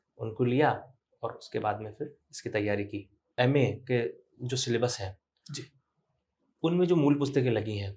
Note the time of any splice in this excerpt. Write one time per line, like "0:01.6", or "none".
0:03.3